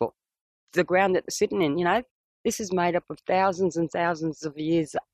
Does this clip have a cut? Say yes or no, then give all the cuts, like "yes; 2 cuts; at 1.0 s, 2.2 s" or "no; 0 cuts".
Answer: no; 0 cuts